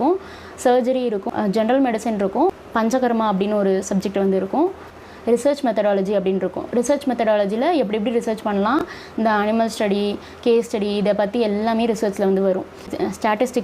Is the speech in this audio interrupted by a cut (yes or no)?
no